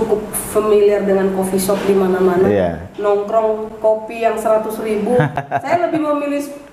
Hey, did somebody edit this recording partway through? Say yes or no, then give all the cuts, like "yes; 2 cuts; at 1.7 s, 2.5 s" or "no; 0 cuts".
no; 0 cuts